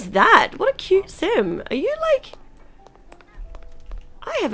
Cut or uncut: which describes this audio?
uncut